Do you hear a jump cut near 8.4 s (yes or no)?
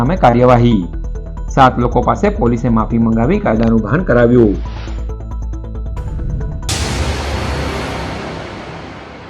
no